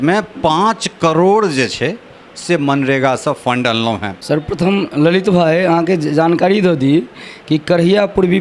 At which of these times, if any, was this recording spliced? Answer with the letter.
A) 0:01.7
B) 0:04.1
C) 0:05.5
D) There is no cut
B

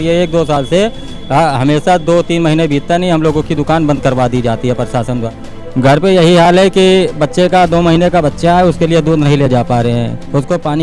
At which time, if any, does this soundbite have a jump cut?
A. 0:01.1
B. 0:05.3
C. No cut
B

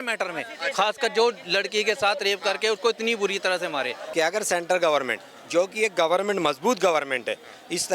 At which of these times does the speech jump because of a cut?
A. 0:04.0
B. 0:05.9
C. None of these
A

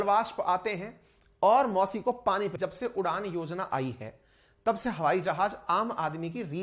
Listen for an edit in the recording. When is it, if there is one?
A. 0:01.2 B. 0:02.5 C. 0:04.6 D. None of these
B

